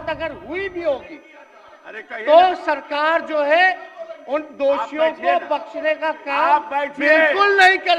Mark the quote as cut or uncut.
uncut